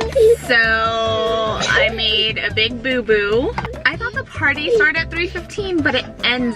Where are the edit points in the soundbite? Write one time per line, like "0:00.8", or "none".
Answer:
none